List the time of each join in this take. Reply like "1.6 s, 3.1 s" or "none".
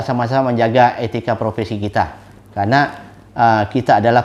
none